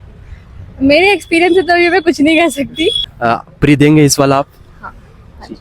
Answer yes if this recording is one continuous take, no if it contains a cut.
no